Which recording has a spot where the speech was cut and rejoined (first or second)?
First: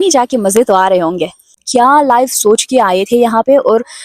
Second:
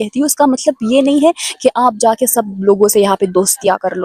first